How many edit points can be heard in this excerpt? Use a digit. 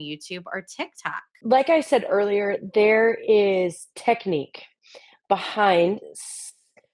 0